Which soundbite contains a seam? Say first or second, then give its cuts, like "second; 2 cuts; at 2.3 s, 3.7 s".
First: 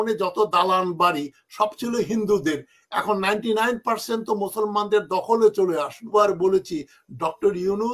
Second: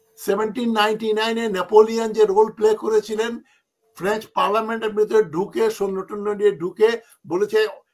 first; 1 cut; at 6.1 s